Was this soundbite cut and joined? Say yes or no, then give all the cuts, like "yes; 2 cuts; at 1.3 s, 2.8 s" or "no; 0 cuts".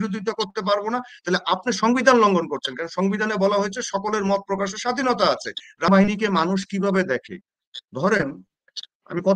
yes; 1 cut; at 5.9 s